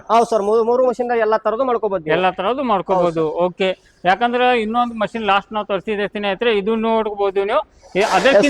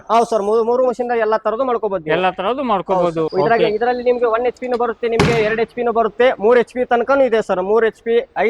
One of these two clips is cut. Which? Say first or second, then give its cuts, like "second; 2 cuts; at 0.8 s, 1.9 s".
second; 1 cut; at 3.3 s